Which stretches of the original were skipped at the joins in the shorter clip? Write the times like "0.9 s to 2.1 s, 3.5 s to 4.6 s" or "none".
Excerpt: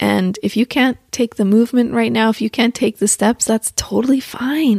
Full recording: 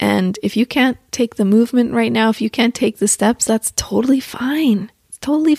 none